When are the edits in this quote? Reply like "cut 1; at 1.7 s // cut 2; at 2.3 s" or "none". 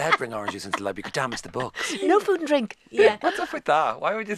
none